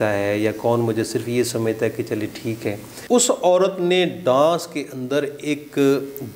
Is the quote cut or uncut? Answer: cut